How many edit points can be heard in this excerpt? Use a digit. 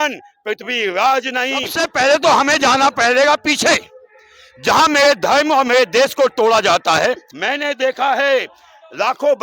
2